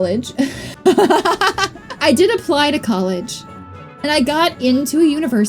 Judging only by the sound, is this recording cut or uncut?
uncut